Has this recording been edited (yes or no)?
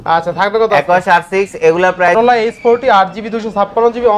yes